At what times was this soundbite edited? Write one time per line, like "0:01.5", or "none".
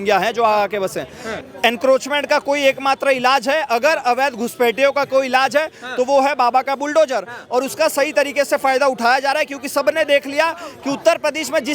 0:01.3